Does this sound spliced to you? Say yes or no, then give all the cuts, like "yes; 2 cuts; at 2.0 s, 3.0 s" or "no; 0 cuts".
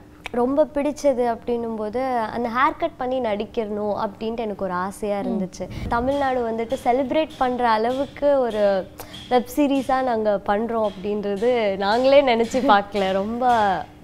yes; 1 cut; at 5.9 s